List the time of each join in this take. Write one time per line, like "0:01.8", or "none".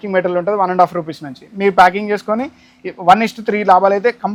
none